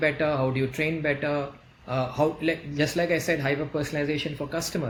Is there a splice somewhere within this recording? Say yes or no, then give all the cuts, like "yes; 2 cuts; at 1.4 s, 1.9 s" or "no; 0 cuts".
no; 0 cuts